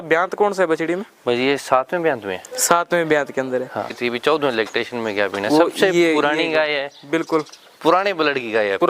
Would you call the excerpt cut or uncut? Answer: cut